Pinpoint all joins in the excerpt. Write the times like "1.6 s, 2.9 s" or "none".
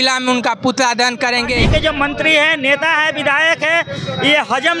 1.6 s